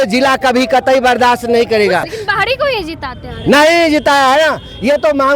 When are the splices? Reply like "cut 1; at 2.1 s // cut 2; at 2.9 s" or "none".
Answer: cut 1; at 2.1 s